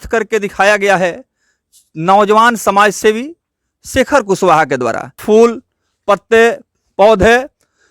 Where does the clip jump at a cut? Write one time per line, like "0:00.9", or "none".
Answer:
0:05.2